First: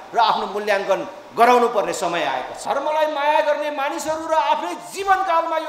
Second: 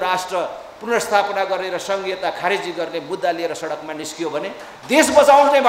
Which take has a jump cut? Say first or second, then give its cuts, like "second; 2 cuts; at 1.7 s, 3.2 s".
first; 1 cut; at 2.5 s